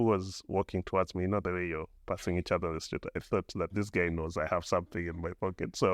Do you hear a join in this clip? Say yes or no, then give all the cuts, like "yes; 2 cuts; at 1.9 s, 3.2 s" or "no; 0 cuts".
no; 0 cuts